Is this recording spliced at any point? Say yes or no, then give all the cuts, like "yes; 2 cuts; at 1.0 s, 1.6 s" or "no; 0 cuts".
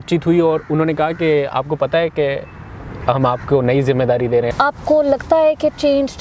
yes; 1 cut; at 4.5 s